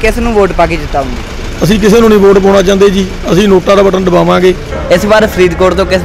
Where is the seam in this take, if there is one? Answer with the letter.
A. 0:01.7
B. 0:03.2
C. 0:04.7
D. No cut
C